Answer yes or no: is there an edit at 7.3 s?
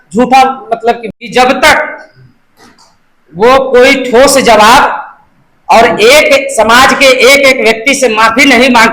no